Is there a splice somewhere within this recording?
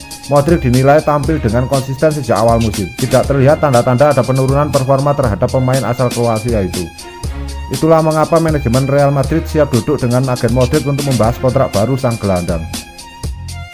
yes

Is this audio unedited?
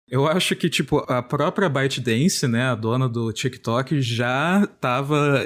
no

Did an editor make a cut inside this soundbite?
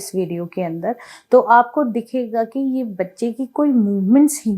no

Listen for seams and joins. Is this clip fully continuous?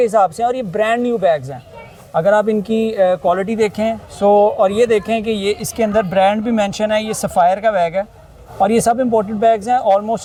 yes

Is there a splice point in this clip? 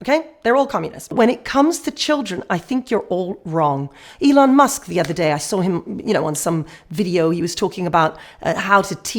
yes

